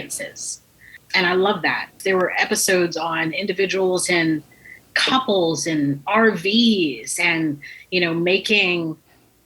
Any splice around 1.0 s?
yes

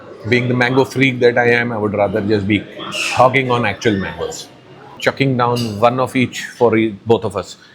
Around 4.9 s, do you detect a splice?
yes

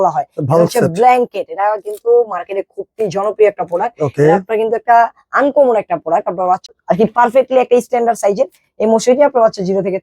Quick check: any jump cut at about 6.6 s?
yes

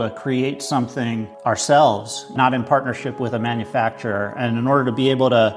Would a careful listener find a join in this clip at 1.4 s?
no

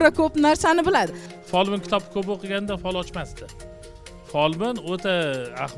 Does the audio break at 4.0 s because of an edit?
no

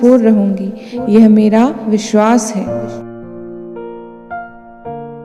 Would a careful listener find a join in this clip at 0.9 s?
no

